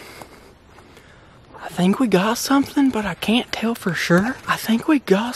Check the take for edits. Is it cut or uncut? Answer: uncut